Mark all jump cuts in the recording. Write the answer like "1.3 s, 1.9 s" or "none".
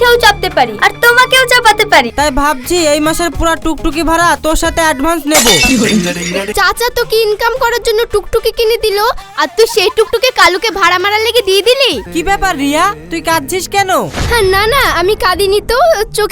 2.1 s, 6.5 s, 12.0 s

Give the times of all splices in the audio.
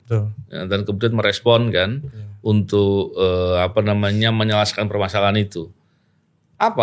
none

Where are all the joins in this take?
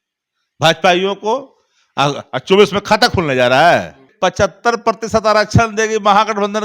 4.1 s

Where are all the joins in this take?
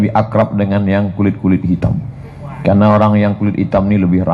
none

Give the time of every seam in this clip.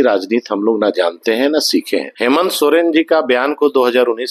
2.1 s

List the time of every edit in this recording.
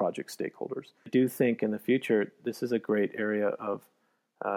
1.1 s

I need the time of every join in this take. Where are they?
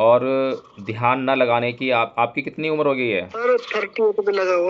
3.3 s

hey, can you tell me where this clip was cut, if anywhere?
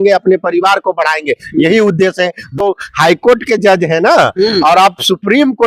2.5 s

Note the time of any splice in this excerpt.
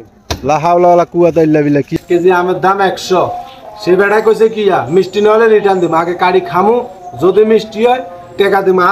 1.9 s

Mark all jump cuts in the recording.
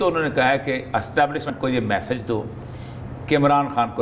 1.5 s

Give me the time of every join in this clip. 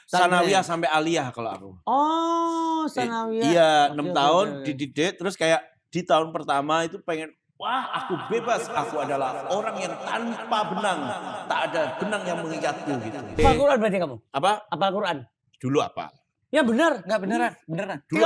13.4 s

